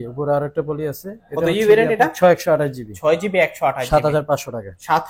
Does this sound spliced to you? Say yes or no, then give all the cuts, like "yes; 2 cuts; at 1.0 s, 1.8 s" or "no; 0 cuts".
no; 0 cuts